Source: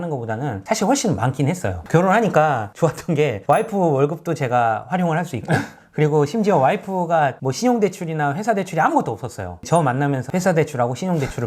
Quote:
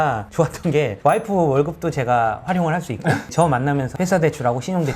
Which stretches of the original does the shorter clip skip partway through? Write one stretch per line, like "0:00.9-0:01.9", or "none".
0:05.7-0:09.6